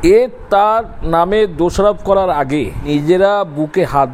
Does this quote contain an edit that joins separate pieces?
yes; 1 cut; at 2.9 s

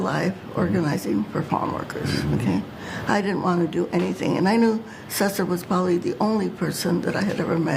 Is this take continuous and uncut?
yes; 0 cuts

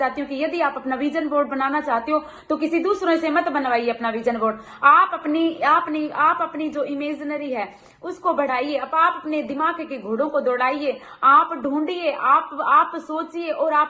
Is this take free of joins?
yes; 0 cuts

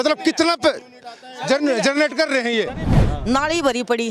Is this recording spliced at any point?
yes; 1 cut; at 3.0 s

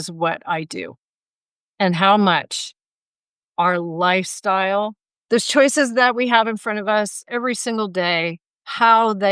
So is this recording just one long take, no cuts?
no; 1 cut; at 5.1 s

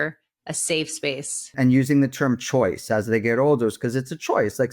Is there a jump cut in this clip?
yes; 1 cut; at 1.5 s

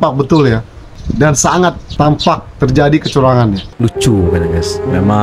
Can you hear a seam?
yes; 3 cuts; at 1.0 s, 1.8 s, 3.7 s

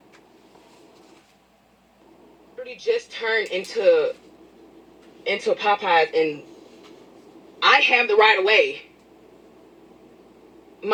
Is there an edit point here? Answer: no; 0 cuts

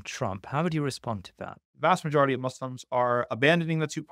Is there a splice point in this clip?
yes; 1 cut; at 1.6 s

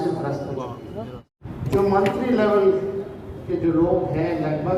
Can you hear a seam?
yes; 1 cut; at 1.4 s

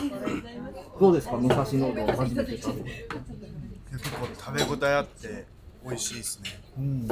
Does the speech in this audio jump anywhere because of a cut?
no; 0 cuts

